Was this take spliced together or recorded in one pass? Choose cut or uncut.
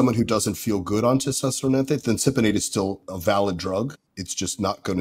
cut